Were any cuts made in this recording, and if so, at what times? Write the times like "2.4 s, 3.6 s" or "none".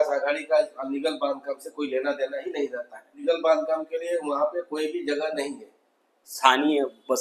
3.2 s, 6.3 s